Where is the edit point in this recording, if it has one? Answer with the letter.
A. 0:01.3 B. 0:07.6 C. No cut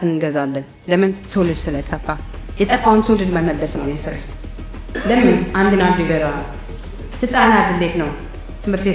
C